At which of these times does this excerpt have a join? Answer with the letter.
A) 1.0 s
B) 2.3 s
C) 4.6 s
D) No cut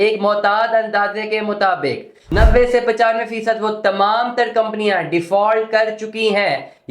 B